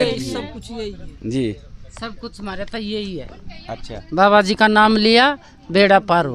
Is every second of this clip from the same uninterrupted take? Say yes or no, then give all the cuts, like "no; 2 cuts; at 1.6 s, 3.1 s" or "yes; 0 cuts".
yes; 0 cuts